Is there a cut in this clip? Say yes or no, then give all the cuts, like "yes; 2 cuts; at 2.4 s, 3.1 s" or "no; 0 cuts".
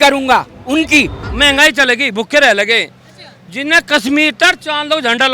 yes; 1 cut; at 1.2 s